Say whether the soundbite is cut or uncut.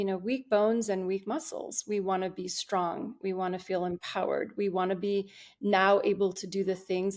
uncut